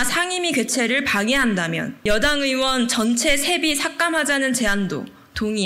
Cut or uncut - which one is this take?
cut